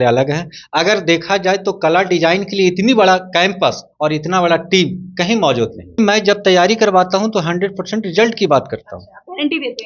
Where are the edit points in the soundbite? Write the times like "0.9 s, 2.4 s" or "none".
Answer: 6.0 s